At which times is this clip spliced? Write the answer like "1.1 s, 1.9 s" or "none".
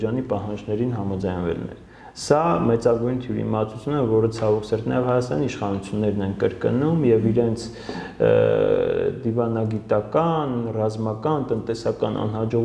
none

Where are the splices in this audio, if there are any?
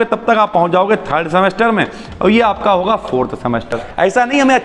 3.7 s

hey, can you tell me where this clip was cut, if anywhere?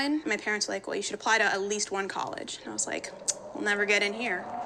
none

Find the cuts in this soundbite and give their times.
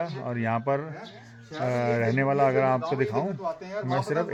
none

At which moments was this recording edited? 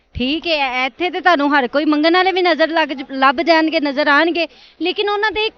none

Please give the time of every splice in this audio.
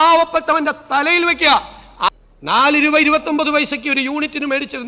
2.1 s

